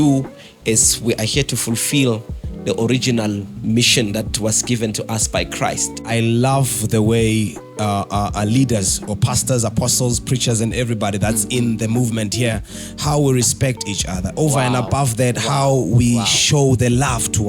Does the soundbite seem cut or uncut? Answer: cut